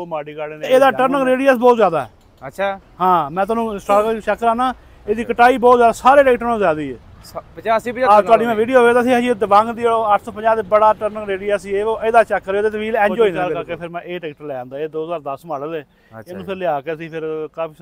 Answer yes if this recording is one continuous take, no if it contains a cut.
no